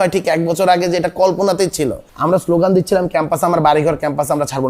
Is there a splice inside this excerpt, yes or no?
yes